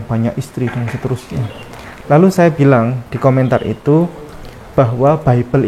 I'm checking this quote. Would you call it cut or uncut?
uncut